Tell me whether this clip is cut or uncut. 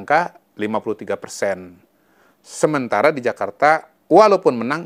uncut